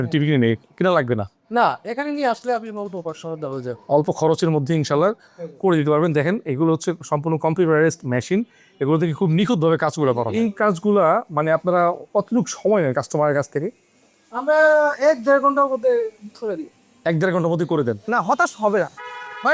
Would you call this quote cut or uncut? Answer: cut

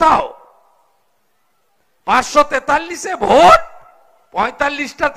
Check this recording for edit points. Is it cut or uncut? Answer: uncut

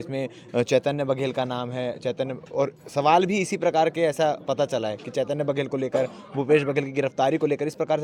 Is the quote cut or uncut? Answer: uncut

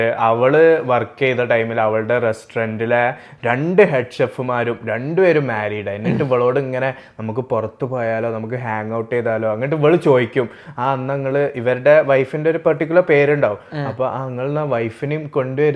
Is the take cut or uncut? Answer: uncut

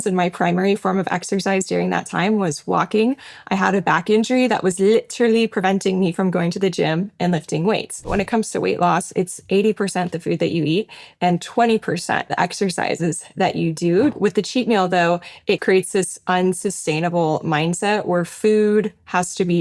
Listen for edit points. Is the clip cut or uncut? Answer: cut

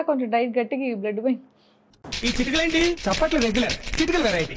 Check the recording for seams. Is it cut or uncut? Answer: uncut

